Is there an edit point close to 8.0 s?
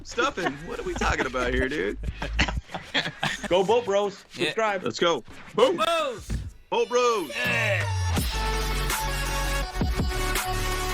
yes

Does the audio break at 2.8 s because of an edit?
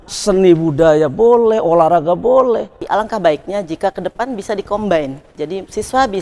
yes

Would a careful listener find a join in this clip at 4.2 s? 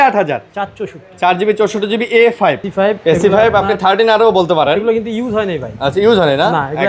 no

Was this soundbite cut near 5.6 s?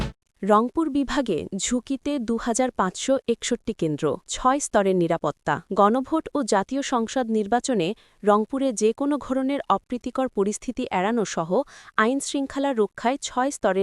yes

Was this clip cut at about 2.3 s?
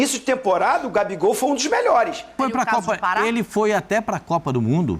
yes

